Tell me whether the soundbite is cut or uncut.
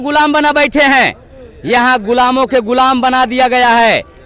uncut